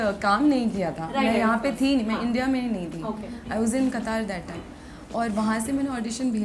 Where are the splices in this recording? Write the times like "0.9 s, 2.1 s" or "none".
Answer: none